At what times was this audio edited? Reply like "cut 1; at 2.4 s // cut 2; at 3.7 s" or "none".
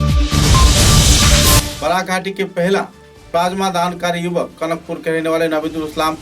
cut 1; at 1.7 s